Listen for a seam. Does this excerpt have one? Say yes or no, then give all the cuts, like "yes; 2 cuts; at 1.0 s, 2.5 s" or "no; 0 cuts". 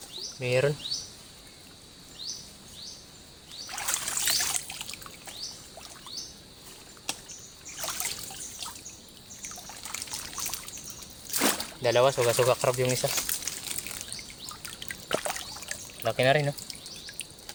no; 0 cuts